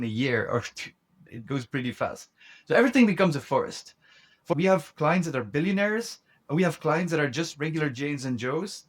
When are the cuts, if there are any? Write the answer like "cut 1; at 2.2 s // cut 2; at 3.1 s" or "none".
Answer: cut 1; at 4.5 s